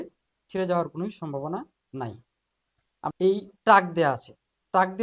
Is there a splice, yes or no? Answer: yes